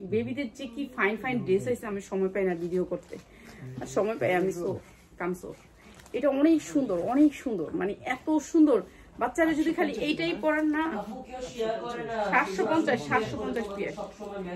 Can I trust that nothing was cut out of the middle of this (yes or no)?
yes